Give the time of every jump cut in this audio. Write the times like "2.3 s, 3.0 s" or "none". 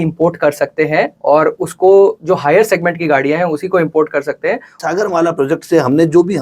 4.8 s